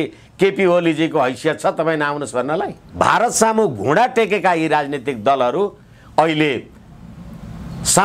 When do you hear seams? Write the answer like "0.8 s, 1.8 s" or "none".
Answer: 2.8 s